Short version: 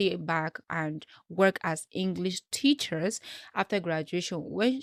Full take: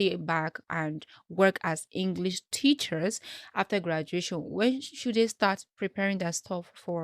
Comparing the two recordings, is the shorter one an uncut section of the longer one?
yes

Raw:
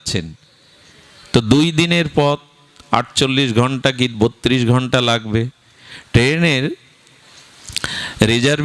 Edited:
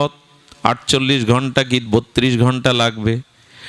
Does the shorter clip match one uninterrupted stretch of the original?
yes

